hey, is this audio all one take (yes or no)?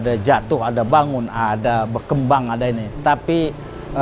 yes